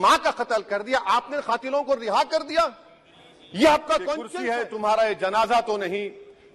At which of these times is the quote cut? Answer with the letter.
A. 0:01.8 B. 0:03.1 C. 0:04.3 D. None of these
C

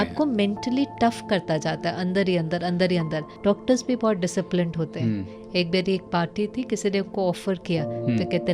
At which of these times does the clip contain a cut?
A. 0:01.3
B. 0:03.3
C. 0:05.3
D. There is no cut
B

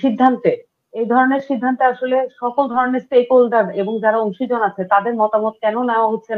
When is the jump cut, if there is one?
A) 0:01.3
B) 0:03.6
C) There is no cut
C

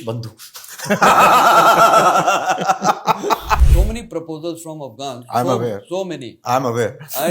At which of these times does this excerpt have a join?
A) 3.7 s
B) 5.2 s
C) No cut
A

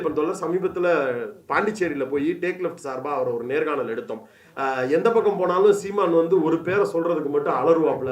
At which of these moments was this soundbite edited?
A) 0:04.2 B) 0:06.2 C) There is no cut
C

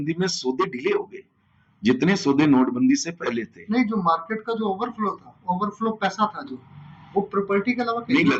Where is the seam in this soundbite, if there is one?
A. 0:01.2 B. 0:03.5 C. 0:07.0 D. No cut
D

